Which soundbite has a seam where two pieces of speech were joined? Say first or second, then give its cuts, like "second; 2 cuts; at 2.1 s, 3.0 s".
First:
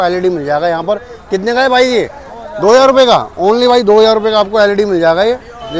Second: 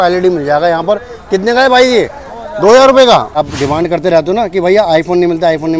second; 1 cut; at 3.3 s